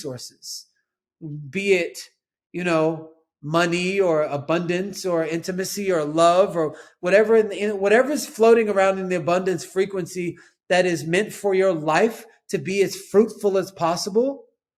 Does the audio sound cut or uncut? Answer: uncut